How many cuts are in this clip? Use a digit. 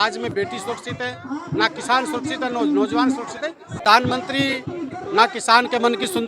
1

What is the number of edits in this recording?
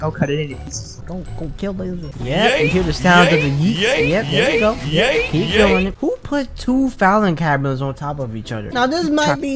2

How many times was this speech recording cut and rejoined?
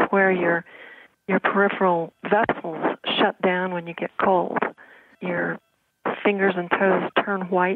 1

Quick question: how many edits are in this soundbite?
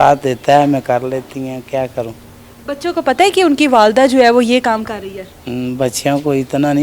0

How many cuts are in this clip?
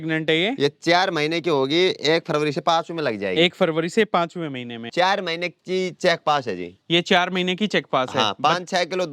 1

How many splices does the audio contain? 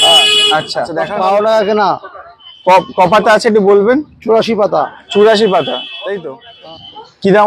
2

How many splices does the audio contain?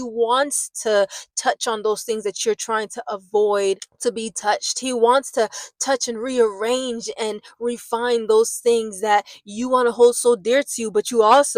0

